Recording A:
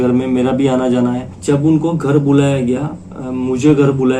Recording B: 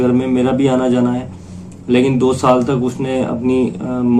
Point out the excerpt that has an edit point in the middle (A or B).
A